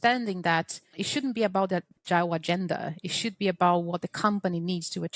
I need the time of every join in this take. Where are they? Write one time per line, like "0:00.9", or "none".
0:01.0
0:01.9